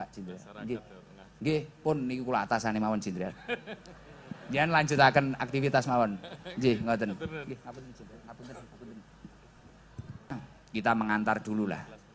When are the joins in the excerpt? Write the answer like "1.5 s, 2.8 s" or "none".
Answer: 10.5 s